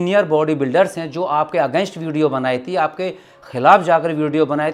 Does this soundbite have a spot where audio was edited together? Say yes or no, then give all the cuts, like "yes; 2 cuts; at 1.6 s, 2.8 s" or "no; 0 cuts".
no; 0 cuts